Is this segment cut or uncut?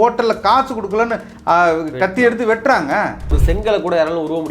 cut